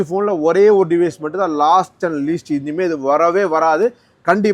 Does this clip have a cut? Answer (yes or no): no